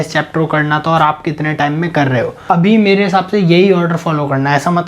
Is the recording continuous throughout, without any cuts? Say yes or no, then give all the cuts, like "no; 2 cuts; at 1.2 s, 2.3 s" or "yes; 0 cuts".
no; 1 cut; at 2.4 s